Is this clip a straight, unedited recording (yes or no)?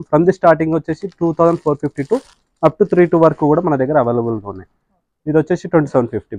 yes